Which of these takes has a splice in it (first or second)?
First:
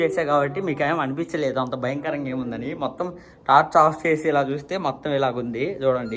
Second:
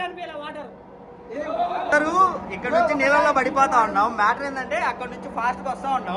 second